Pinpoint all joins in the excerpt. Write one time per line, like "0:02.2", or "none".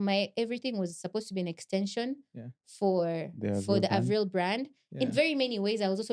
none